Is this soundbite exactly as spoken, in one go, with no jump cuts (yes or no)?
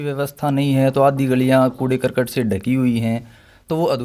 yes